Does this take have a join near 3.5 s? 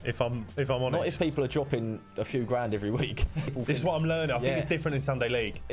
yes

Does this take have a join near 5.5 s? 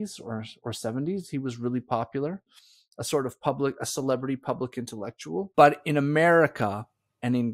yes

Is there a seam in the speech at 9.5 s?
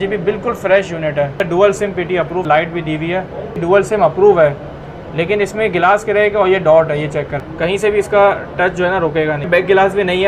yes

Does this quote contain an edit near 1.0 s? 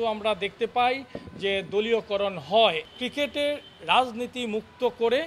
no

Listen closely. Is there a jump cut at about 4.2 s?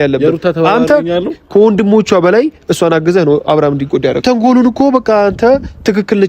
yes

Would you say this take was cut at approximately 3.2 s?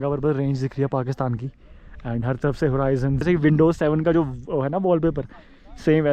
yes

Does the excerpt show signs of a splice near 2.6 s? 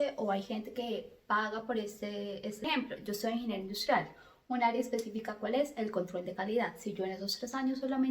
yes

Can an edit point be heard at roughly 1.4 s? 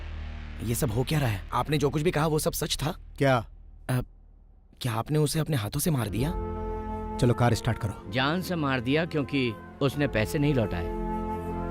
yes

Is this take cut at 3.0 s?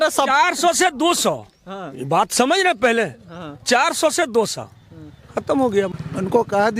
no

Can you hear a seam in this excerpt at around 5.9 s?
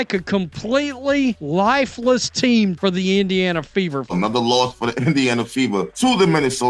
yes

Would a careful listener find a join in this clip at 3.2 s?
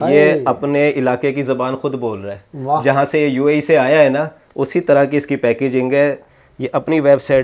no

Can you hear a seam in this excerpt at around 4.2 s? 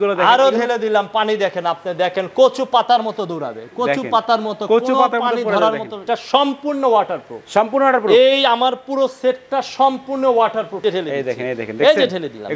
no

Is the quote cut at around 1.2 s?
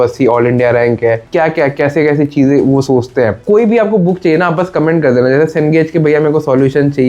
yes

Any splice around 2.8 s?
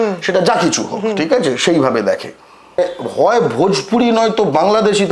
yes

